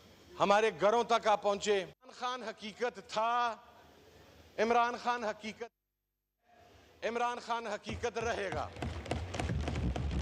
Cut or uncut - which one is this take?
cut